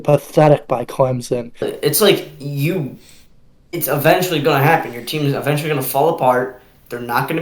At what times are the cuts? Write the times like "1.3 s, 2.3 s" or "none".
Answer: 1.7 s